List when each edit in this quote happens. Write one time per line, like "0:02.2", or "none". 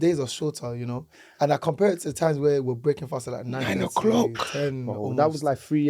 none